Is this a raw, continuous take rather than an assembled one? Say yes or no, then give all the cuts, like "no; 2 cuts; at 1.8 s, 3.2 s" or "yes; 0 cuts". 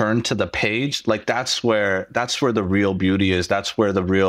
yes; 0 cuts